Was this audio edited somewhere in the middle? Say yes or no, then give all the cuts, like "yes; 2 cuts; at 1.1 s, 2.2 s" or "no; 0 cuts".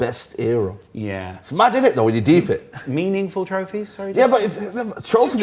yes; 1 cut; at 2.8 s